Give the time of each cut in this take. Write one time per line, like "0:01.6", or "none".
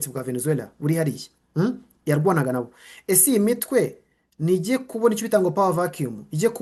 none